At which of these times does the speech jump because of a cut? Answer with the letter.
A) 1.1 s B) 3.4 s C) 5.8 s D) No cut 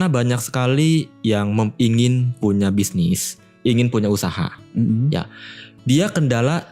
D